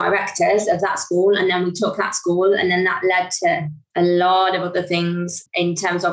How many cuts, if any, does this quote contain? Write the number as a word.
zero